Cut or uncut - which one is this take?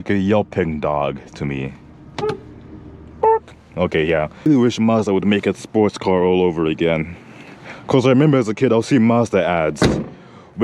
cut